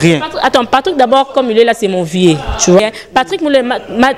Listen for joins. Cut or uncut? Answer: cut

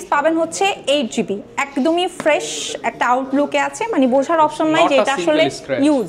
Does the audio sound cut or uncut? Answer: uncut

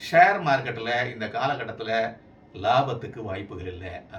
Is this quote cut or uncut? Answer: uncut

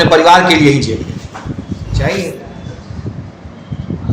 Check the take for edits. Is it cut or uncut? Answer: cut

